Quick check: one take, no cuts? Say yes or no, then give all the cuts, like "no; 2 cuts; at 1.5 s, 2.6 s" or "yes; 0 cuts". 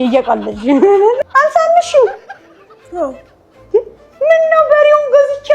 no; 1 cut; at 1.2 s